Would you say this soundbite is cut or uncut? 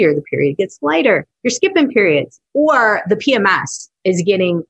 cut